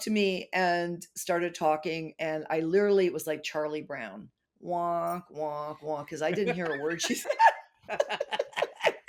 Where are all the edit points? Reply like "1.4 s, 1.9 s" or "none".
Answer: none